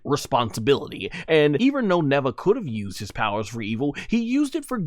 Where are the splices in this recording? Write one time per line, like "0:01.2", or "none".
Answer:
0:01.6